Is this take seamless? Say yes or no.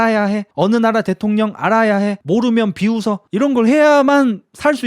no